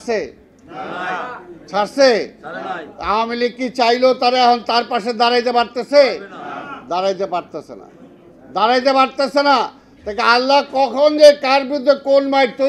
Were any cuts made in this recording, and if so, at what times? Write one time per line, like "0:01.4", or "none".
none